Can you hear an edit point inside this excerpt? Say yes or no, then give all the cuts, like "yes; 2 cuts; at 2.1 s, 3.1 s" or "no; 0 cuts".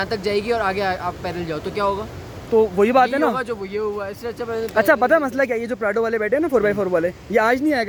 no; 0 cuts